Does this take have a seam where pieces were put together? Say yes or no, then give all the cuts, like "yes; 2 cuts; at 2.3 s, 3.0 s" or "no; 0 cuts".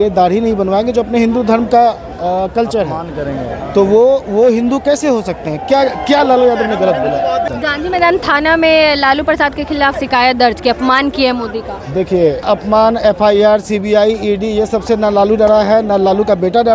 yes; 3 cuts; at 7.5 s, 10.0 s, 12.4 s